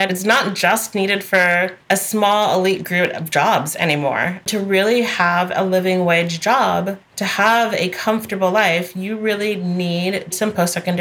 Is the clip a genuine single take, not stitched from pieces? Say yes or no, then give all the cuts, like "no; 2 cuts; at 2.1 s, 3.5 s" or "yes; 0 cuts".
yes; 0 cuts